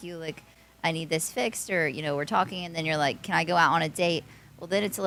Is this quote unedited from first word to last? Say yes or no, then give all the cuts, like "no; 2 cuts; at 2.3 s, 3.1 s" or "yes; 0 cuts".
yes; 0 cuts